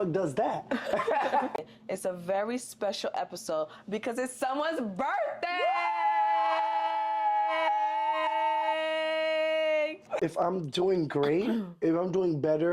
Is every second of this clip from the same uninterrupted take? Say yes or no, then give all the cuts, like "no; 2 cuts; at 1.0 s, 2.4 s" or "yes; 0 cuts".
no; 2 cuts; at 1.6 s, 10.1 s